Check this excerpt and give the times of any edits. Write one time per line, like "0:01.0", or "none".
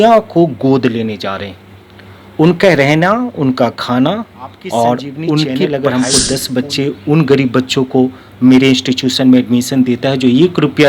0:05.6